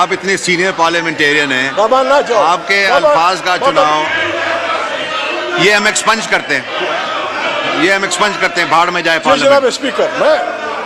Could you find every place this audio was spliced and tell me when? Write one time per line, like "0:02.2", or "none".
none